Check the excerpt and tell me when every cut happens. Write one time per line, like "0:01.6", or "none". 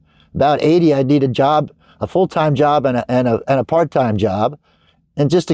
none